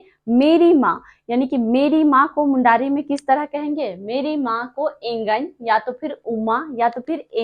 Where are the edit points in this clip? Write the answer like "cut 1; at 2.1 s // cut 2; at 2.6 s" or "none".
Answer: none